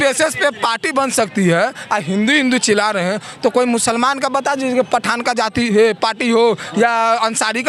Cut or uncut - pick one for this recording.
uncut